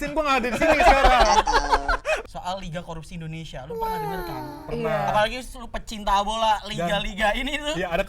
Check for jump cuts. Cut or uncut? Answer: cut